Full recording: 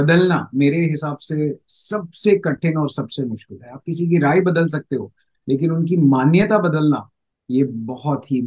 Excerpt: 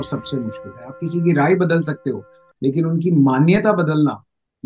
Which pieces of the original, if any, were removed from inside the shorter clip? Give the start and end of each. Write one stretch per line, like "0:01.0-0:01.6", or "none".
none